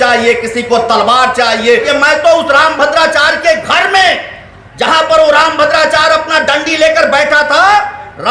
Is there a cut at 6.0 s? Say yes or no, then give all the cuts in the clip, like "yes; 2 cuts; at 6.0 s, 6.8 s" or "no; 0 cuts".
no; 1 cut; at 1.9 s